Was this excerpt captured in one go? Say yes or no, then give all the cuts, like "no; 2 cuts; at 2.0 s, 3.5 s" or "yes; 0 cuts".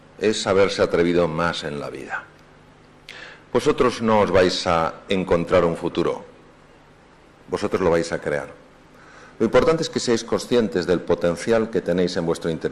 yes; 0 cuts